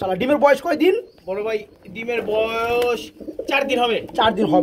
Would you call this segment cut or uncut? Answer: uncut